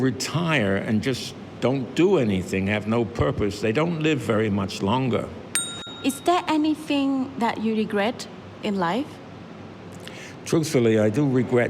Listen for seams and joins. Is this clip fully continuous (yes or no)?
no